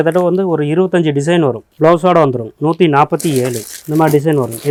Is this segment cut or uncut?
uncut